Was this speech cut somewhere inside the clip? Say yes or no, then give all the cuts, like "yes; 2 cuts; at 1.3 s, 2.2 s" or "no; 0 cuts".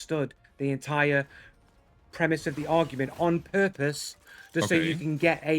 yes; 1 cut; at 3.4 s